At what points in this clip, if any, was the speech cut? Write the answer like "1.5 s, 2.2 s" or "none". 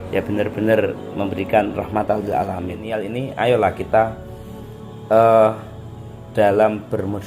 3.0 s